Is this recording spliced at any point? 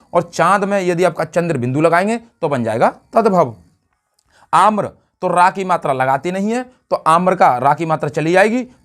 no; 0 cuts

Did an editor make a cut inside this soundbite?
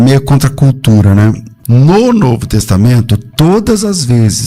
yes; 1 cut; at 1.5 s

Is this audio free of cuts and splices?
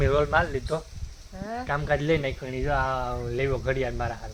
yes; 0 cuts

